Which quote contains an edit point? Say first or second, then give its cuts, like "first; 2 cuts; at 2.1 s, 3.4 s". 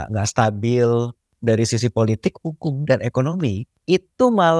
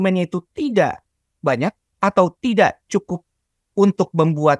first; 2 cuts; at 1.2 s, 3.7 s